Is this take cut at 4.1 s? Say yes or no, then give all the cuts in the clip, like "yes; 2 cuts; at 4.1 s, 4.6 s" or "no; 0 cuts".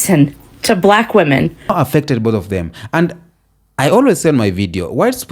no; 1 cut; at 1.7 s